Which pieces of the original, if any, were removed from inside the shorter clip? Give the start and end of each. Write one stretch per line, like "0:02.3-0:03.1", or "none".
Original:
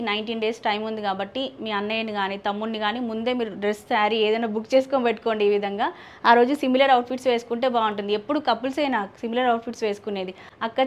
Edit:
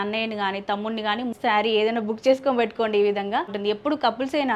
0:03.1-0:03.8
0:06.0-0:08.0